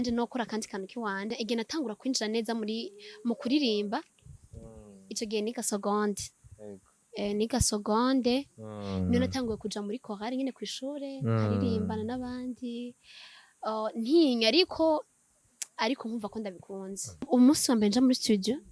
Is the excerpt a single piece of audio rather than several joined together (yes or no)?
no